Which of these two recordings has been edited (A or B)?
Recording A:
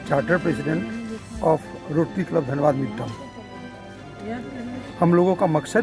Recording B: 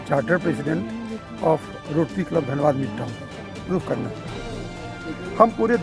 B